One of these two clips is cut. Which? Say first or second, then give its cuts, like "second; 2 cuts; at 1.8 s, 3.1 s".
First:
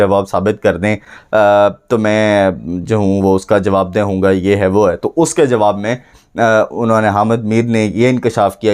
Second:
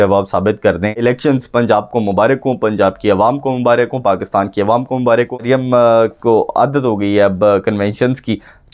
second; 2 cuts; at 1.0 s, 5.4 s